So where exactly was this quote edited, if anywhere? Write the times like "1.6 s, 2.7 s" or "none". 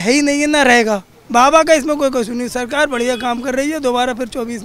1.1 s